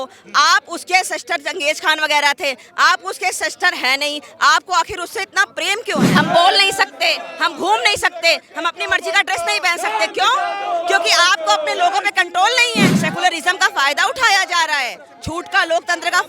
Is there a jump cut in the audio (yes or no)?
yes